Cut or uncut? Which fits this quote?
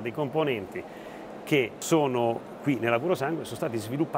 cut